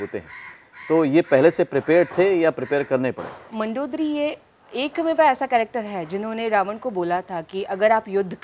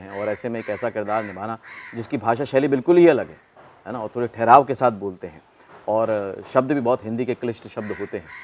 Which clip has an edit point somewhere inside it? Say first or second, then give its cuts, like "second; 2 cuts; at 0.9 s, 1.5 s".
first; 1 cut; at 3.5 s